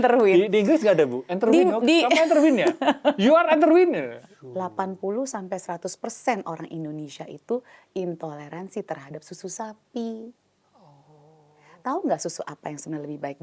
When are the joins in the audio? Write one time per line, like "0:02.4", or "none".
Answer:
0:04.1